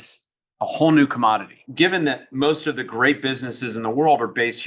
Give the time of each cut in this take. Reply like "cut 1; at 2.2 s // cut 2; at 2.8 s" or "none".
cut 1; at 1.6 s